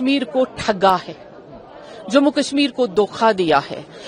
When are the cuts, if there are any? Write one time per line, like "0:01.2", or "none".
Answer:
none